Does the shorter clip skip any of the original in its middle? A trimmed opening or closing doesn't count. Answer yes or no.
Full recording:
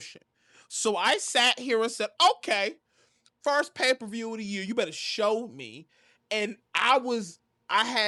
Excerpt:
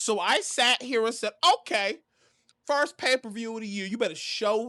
no